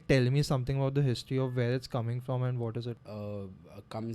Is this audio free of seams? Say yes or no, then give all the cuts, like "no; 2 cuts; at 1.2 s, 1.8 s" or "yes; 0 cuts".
no; 1 cut; at 3.0 s